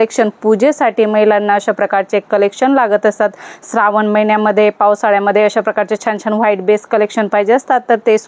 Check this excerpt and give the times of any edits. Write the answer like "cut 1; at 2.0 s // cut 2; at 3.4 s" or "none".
none

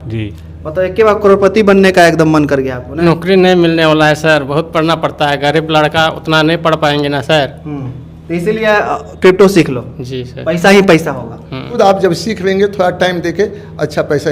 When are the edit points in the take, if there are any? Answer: cut 1; at 2.9 s // cut 2; at 11.8 s

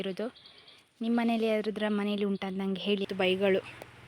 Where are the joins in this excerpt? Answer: cut 1; at 3.1 s

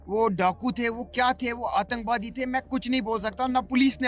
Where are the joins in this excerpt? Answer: none

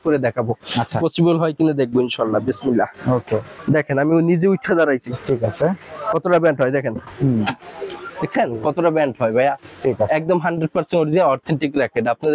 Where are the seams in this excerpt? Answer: cut 1; at 3.6 s

